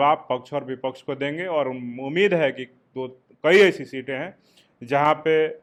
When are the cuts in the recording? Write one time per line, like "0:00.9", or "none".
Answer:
none